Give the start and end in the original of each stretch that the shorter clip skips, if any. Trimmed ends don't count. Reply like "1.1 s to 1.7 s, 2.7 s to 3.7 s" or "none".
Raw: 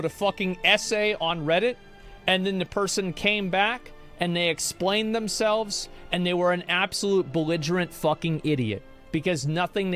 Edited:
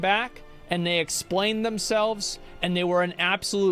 none